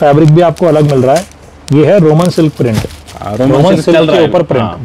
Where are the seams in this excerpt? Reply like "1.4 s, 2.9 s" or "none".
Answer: none